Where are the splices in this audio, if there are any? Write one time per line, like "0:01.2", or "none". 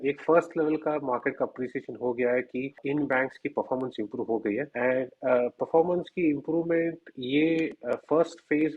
0:02.8
0:04.7